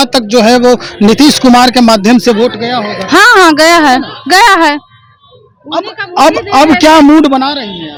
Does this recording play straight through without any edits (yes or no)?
yes